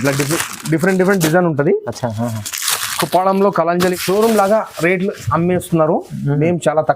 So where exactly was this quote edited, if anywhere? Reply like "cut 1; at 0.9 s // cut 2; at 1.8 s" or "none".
cut 1; at 4.0 s